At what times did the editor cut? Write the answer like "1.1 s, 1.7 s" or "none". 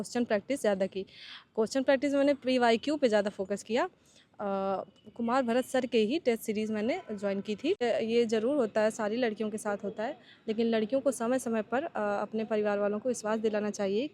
7.8 s